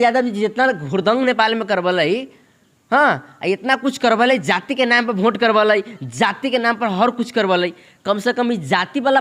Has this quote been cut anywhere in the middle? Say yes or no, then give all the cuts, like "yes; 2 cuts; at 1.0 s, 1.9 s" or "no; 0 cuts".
no; 0 cuts